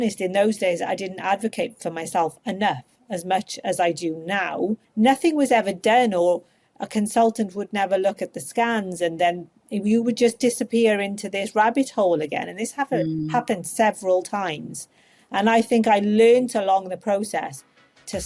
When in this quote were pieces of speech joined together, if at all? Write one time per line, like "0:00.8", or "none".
0:04.8